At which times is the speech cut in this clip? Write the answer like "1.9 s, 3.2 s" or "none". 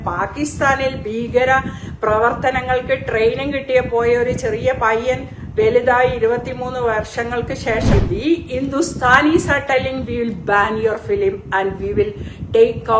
7.9 s